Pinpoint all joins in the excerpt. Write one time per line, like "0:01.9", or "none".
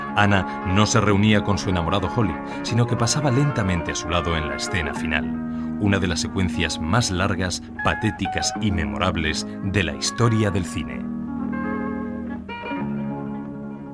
0:04.4